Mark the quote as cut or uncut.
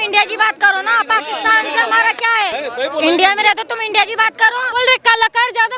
cut